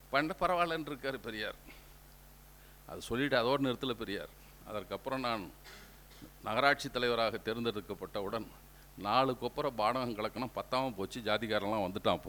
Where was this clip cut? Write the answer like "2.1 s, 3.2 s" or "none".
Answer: none